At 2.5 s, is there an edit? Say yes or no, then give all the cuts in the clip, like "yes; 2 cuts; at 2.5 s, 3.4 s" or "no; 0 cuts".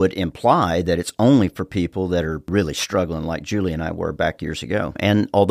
yes; 1 cut; at 2.5 s